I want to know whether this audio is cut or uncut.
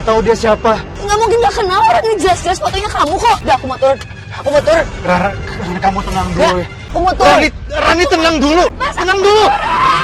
cut